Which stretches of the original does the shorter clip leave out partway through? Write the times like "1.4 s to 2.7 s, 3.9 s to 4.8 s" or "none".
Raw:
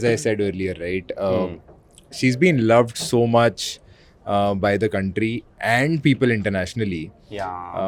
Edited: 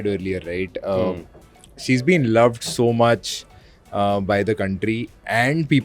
none